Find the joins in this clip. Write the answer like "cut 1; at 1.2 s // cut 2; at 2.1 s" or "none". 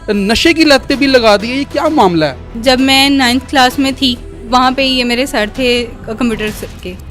cut 1; at 2.6 s // cut 2; at 4.4 s